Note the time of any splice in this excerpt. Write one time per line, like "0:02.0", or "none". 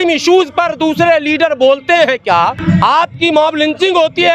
0:02.6